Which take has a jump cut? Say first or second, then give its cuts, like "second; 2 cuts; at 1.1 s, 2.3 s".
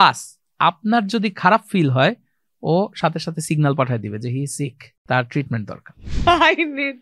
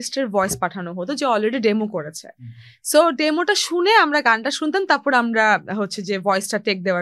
first; 2 cuts; at 4.9 s, 6.0 s